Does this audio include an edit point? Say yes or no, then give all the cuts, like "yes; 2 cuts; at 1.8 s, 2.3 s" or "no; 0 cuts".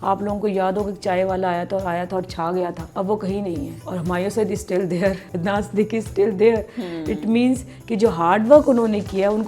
yes; 3 cuts; at 2.8 s, 3.8 s, 5.3 s